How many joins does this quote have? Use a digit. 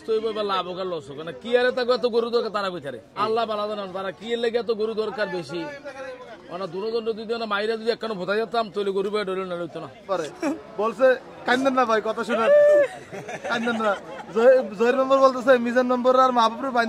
2